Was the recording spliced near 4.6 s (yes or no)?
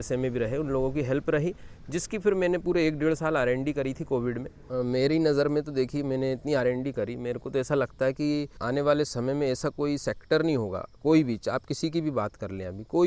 yes